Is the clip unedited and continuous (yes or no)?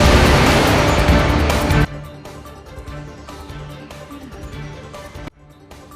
no